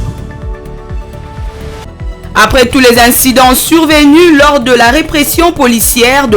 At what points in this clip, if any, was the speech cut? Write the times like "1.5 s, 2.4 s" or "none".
1.9 s